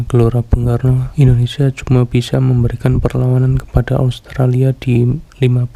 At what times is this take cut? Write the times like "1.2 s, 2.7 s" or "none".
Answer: 1.1 s

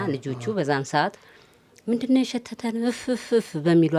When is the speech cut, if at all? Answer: none

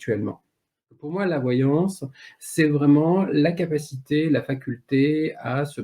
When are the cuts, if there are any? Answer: 1.1 s

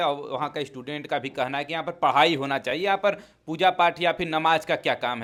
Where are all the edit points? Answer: none

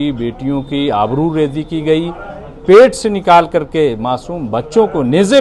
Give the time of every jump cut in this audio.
none

